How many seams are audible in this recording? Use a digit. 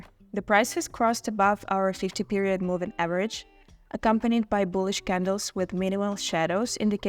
0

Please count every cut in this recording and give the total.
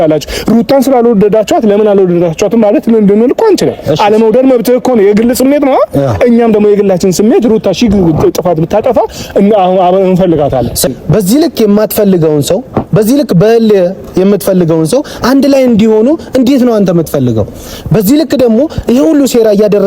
1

